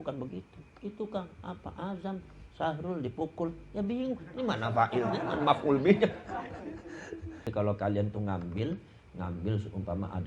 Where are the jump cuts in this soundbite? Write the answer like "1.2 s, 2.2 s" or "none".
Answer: 7.5 s